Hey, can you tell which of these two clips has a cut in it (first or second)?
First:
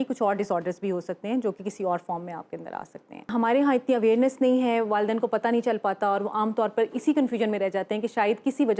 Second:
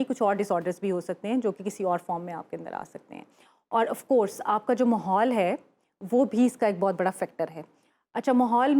first